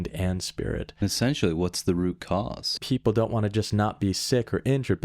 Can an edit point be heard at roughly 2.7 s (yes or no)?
yes